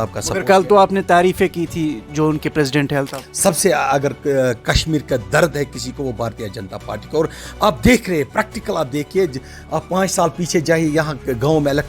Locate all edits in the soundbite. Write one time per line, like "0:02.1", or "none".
0:03.2